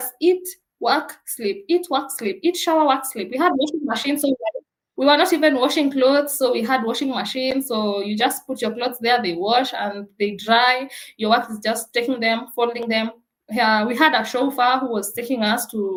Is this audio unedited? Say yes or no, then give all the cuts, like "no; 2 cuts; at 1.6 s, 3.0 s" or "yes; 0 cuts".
yes; 0 cuts